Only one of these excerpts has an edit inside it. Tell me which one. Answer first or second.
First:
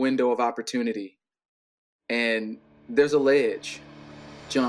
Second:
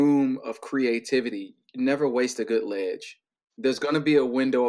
second